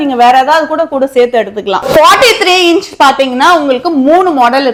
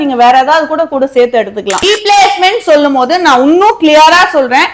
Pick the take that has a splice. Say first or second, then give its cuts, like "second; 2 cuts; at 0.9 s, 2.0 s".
second; 1 cut; at 1.8 s